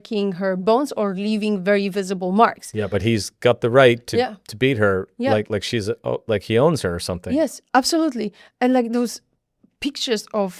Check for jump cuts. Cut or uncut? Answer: uncut